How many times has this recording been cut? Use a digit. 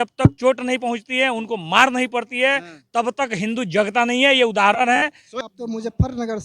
1